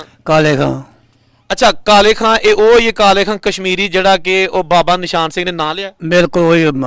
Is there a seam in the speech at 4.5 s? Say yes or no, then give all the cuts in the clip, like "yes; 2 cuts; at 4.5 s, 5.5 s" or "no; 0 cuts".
no; 0 cuts